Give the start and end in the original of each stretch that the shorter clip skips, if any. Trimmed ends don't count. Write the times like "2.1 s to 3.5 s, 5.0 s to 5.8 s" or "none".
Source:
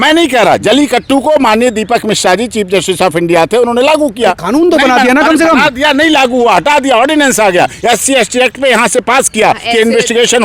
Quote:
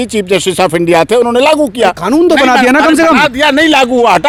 none